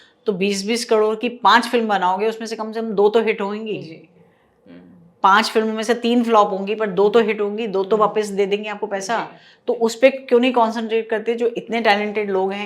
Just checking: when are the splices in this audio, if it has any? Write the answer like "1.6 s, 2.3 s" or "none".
none